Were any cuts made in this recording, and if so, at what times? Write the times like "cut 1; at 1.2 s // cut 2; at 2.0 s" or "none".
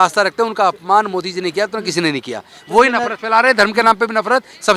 none